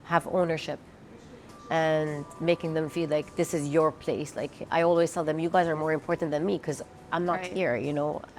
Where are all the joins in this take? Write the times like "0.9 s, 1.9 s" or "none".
none